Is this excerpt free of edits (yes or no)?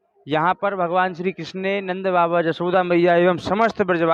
yes